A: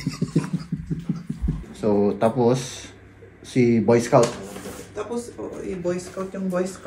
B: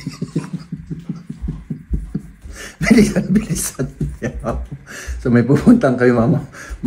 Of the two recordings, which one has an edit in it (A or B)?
A